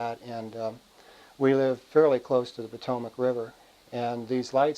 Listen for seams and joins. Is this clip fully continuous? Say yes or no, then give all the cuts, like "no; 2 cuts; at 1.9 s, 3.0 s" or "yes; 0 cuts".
no; 1 cut; at 3.5 s